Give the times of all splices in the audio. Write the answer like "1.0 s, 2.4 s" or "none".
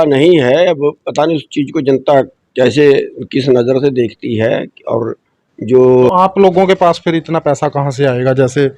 6.1 s